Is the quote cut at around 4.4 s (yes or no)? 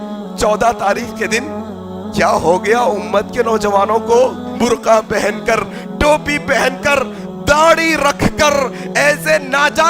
yes